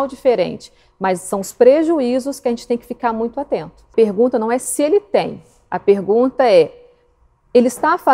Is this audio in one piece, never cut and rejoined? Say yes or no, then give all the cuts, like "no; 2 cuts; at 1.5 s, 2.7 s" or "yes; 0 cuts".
no; 1 cut; at 3.9 s